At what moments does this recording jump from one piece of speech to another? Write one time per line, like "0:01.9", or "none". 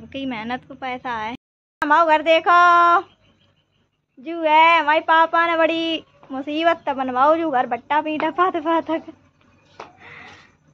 none